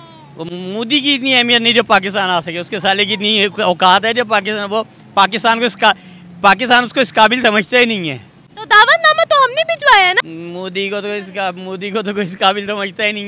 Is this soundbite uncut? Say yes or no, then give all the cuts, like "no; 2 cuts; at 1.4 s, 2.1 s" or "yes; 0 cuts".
no; 1 cut; at 10.2 s